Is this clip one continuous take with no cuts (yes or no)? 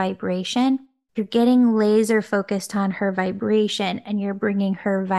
no